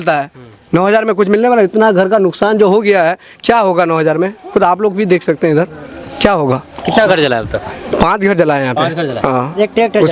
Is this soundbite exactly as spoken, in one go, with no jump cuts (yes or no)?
yes